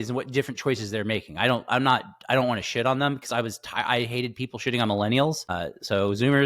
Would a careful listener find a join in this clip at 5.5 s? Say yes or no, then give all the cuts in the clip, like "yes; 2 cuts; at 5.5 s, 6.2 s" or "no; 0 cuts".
yes; 1 cut; at 5.5 s